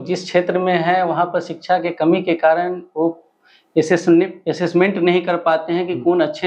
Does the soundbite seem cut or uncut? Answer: uncut